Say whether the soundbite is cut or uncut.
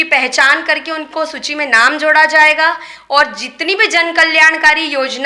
uncut